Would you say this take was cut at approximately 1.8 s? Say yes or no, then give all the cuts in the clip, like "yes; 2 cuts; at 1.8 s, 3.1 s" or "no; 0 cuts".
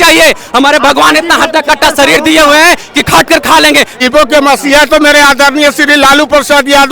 no; 1 cut; at 4.0 s